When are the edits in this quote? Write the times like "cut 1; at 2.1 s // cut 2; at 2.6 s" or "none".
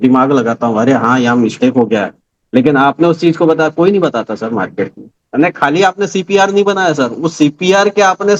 cut 1; at 5.2 s